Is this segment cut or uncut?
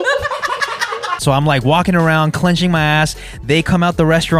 cut